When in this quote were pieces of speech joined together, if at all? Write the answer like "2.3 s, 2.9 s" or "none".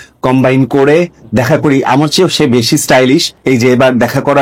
3.3 s